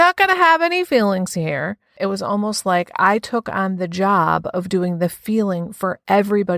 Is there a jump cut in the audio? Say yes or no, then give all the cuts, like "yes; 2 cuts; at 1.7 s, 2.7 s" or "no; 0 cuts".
yes; 1 cut; at 1.9 s